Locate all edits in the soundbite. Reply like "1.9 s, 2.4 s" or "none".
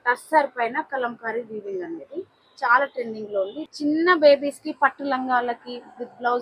3.6 s